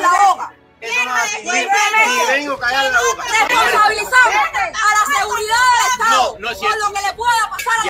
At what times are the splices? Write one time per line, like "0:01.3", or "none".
0:03.6

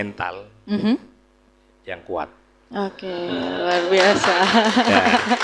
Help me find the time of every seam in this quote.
none

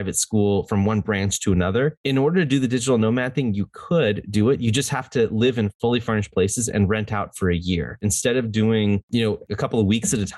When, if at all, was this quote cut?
0:02.0
0:05.7
0:08.0
0:09.3

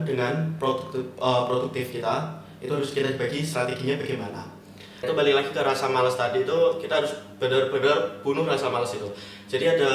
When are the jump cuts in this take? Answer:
0:05.0

